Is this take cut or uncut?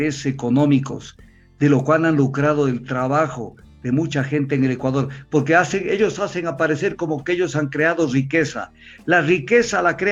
uncut